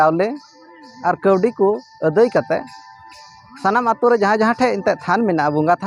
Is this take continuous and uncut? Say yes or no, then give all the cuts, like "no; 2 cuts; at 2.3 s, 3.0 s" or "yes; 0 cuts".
yes; 0 cuts